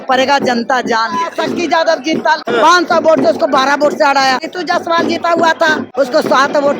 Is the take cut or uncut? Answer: cut